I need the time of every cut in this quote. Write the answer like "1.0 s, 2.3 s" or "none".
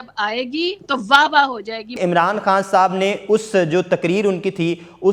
1.9 s